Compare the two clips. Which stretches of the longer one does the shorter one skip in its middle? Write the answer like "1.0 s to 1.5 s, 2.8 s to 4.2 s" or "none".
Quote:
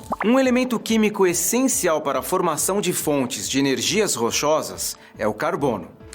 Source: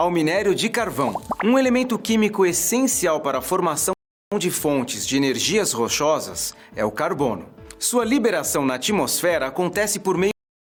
3.9 s to 4.3 s